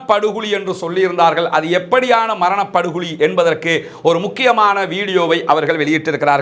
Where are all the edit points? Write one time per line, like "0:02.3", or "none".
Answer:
none